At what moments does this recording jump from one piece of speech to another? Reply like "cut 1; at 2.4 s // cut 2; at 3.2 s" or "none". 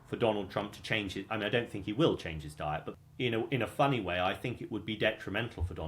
cut 1; at 2.9 s